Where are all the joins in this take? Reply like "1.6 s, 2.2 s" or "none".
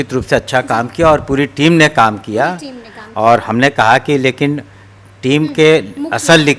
none